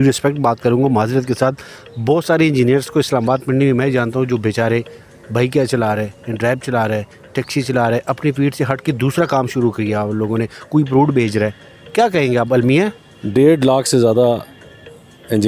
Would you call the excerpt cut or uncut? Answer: uncut